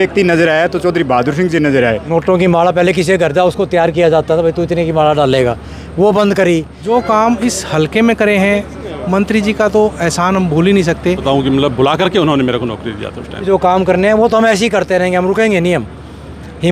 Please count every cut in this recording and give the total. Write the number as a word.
four